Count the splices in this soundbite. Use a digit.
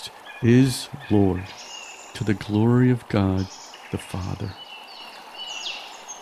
1